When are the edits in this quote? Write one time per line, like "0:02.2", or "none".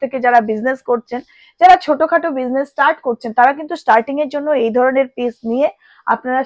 none